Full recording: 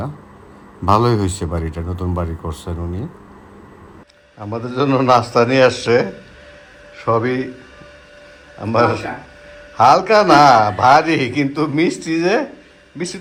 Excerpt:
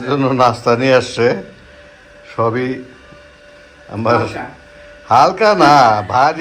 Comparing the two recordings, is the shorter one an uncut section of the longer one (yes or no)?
yes